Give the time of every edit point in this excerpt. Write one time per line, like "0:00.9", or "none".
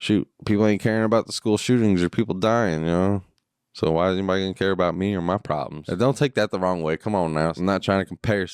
0:05.8
0:07.5